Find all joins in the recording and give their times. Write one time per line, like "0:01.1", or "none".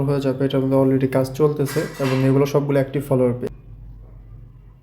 0:03.5